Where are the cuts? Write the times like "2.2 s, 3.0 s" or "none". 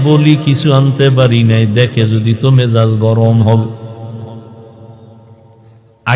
none